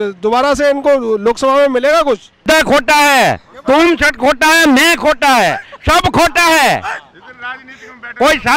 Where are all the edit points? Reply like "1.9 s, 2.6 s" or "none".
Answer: 2.4 s